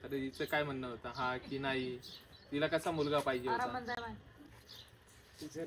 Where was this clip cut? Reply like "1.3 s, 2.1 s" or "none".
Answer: none